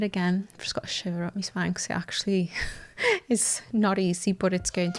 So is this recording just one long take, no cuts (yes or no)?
yes